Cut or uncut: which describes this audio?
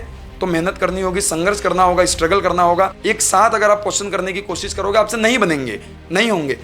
cut